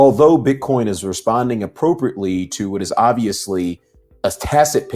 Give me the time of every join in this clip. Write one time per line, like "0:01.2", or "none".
none